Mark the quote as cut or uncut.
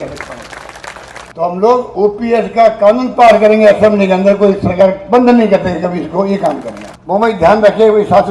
cut